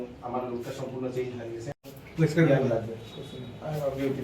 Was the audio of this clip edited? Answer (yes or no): yes